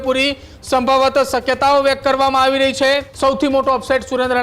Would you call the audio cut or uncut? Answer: cut